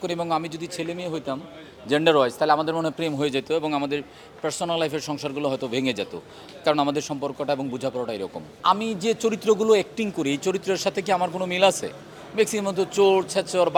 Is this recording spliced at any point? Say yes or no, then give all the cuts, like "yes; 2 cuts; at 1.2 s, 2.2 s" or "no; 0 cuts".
no; 0 cuts